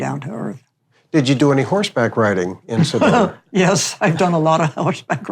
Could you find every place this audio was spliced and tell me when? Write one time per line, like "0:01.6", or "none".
none